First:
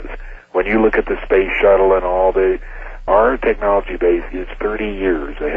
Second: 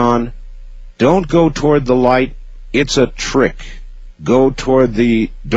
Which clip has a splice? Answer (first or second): first